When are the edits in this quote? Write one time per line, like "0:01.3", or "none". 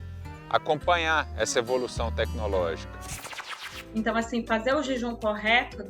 0:03.4